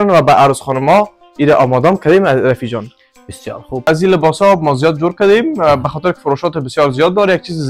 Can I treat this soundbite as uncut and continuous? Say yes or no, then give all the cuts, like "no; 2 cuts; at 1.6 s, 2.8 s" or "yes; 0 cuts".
no; 1 cut; at 3.8 s